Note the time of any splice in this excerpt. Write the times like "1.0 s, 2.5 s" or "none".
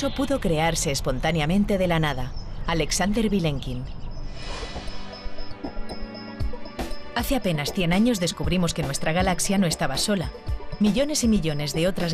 none